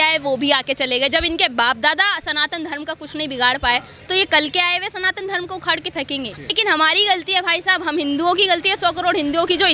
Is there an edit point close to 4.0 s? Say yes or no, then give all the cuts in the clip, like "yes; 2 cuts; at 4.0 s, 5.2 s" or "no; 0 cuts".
no; 1 cut; at 6.6 s